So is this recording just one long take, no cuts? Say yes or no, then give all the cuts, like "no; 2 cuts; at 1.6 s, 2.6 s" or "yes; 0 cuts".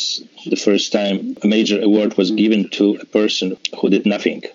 no; 2 cuts; at 1.4 s, 3.6 s